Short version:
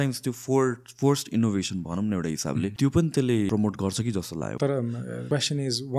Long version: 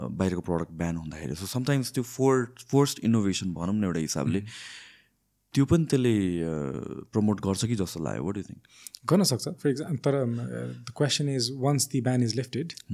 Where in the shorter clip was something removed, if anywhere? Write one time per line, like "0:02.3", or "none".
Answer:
0:02.7
0:03.5
0:04.6
0:05.2